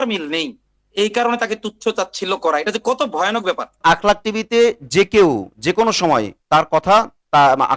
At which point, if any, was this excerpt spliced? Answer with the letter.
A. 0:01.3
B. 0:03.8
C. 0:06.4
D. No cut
B